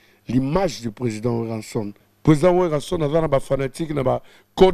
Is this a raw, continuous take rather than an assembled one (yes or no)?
no